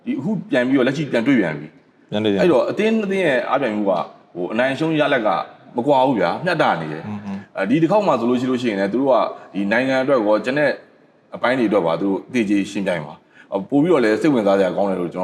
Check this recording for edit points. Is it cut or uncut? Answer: uncut